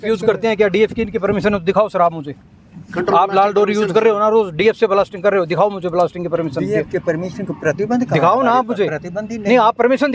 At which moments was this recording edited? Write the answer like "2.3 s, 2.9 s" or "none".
none